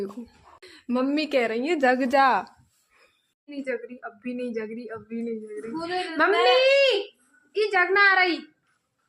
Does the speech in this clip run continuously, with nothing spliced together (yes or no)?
yes